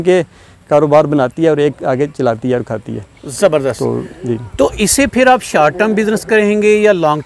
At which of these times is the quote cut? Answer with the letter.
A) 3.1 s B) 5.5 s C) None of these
C